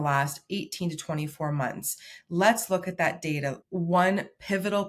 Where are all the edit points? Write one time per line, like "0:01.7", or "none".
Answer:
0:03.6